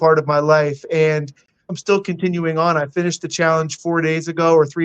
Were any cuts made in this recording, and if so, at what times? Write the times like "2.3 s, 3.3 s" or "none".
1.7 s